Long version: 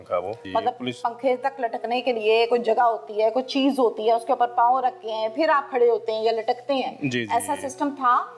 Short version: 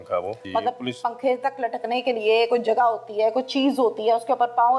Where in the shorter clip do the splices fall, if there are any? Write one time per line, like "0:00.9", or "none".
none